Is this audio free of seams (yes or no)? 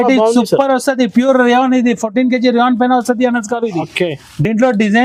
yes